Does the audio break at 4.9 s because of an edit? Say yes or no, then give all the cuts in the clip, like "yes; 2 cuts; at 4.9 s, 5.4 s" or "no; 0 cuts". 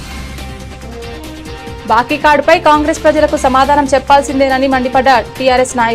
no; 2 cuts; at 0.7 s, 1.7 s